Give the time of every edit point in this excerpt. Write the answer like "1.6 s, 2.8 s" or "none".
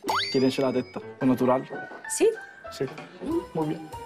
1.0 s